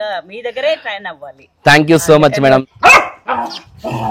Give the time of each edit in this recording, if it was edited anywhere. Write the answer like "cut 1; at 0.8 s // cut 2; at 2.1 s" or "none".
cut 1; at 2.7 s